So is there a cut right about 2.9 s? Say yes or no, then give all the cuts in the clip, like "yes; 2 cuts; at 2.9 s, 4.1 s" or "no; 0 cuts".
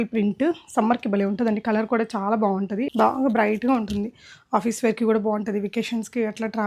yes; 1 cut; at 2.9 s